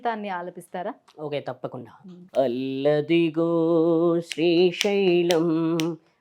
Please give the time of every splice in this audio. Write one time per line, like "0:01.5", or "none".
none